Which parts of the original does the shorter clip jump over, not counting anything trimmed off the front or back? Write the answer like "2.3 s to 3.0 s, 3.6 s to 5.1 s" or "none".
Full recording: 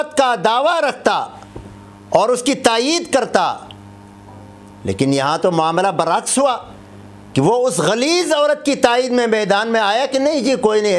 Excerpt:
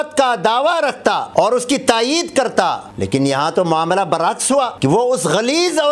1.2 s to 2.0 s, 3.6 s to 4.7 s, 6.6 s to 7.3 s